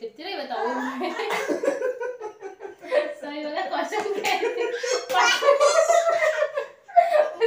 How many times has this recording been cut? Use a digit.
0